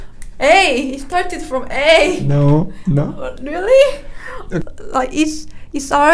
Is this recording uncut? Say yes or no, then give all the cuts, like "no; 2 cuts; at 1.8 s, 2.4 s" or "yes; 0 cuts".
no; 1 cut; at 4.6 s